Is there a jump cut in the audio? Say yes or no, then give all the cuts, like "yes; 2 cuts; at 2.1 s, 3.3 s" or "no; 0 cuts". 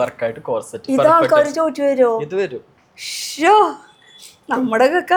no; 0 cuts